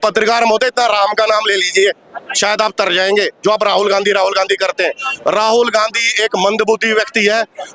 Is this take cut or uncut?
uncut